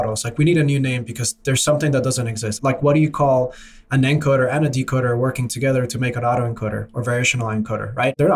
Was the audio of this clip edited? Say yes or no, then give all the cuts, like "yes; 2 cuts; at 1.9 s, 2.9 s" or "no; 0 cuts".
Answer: yes; 1 cut; at 2.5 s